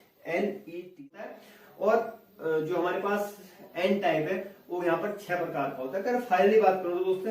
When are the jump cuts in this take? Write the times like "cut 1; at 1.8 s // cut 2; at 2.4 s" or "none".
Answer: cut 1; at 1.1 s